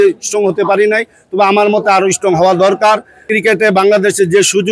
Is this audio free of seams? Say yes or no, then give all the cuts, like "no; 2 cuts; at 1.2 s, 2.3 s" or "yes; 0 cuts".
no; 1 cut; at 3.2 s